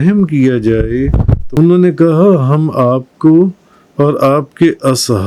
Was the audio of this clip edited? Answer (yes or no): yes